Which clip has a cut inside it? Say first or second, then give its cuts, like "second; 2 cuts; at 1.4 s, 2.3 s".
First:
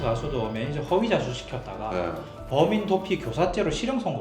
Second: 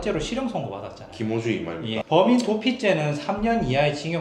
second; 1 cut; at 2.0 s